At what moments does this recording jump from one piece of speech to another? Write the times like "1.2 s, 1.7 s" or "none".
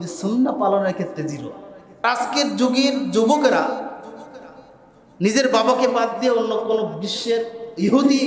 2.0 s